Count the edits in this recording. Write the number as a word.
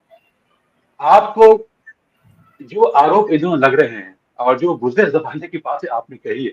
zero